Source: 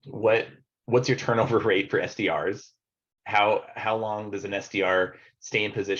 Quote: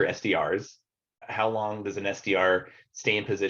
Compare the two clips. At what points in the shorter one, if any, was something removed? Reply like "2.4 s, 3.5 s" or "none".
1.2 s